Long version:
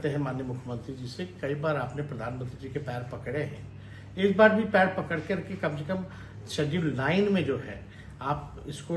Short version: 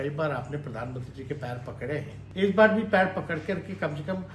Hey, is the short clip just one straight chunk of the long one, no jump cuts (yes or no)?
no